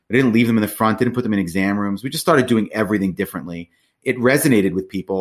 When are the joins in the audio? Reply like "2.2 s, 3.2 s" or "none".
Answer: 3.9 s